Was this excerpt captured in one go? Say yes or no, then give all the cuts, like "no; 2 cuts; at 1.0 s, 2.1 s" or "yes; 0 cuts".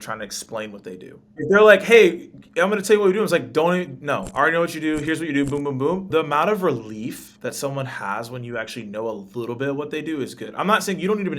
no; 3 cuts; at 1.3 s, 6.1 s, 7.3 s